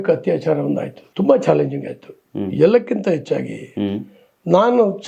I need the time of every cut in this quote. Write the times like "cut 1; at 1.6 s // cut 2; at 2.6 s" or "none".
cut 1; at 1.0 s